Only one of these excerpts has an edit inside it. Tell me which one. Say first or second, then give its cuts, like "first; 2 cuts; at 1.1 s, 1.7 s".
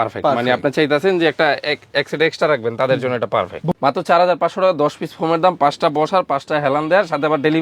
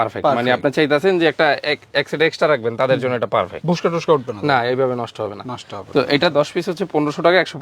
first; 1 cut; at 3.6 s